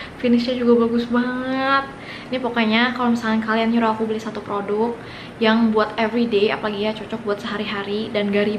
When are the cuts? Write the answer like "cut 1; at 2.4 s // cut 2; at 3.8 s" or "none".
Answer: none